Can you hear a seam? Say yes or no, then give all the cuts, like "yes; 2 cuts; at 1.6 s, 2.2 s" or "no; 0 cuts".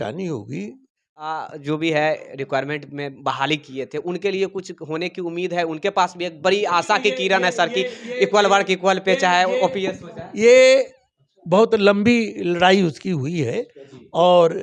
yes; 1 cut; at 1.4 s